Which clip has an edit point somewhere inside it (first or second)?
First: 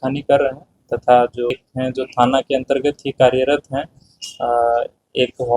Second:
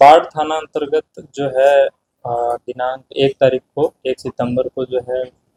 first